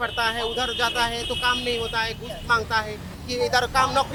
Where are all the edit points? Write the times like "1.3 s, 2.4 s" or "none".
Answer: none

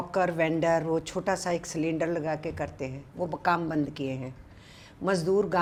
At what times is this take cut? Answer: none

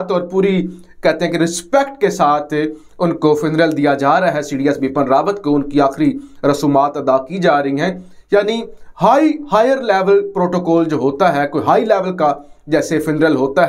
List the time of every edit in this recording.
none

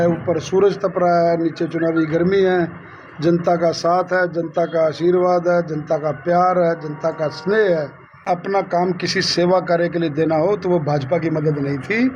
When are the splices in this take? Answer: 8.2 s

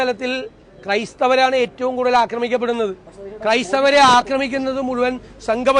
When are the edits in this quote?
none

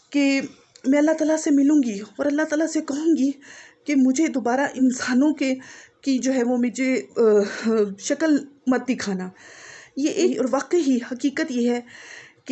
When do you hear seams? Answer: 4.7 s, 10.3 s

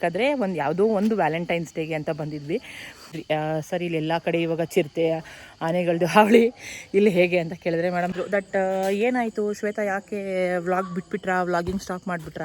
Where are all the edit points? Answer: 3.2 s, 8.2 s

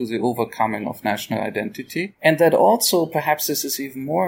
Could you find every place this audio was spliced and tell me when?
2.1 s

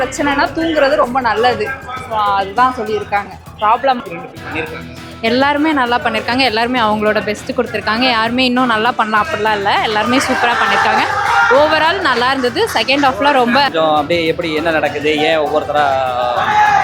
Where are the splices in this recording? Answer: 4.0 s, 13.7 s

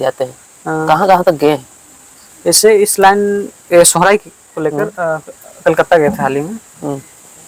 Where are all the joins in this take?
none

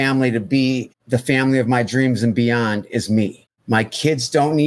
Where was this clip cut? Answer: 0.9 s, 3.5 s

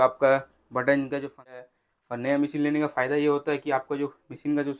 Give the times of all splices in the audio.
1.6 s

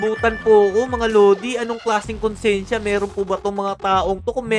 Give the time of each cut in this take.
none

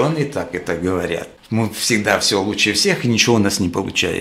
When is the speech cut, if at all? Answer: 1.3 s

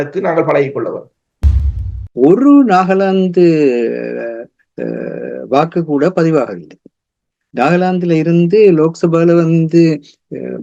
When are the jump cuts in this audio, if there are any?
1.5 s

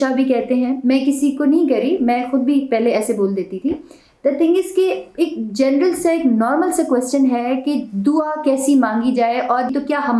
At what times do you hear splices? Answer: none

